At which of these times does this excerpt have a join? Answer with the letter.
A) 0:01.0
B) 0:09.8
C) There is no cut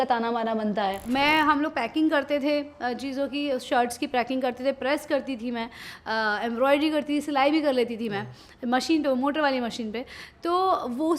A